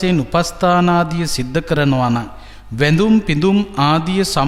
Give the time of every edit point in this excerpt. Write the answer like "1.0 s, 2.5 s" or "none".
none